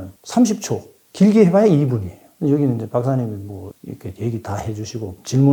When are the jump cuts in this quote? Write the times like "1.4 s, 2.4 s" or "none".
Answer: none

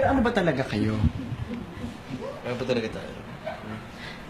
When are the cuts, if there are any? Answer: 3.1 s

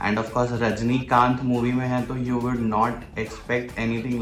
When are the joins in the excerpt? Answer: none

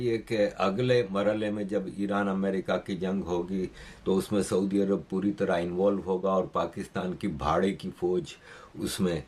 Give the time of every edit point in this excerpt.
none

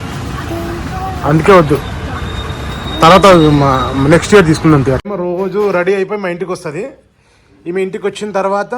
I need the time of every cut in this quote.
5.0 s

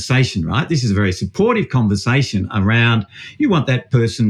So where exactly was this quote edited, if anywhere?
none

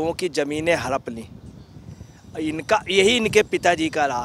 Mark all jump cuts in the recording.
none

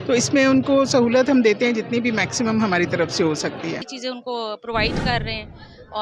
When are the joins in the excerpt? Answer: 3.9 s

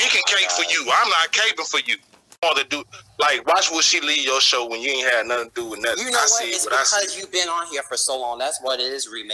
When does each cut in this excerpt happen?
2.3 s

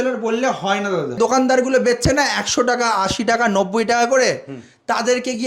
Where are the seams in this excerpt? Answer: 1.2 s

